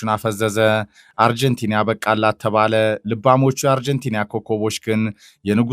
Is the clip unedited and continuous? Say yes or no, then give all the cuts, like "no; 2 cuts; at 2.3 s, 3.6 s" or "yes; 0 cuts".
no; 1 cut; at 1.1 s